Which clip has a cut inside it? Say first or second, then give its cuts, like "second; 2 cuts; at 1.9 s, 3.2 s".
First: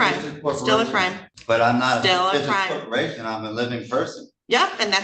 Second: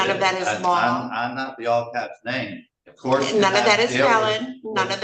first; 1 cut; at 1.3 s